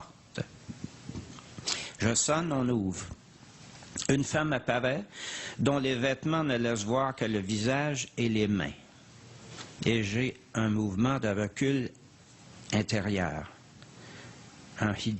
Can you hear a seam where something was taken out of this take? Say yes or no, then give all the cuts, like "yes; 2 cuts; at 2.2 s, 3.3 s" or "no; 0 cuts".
yes; 1 cut; at 12.8 s